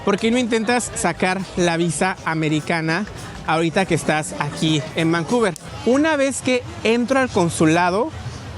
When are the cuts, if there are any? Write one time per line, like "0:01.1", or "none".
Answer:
0:05.7